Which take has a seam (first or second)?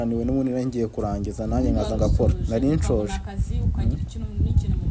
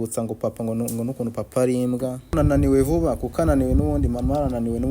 second